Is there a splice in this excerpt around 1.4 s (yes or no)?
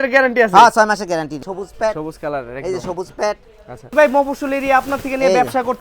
yes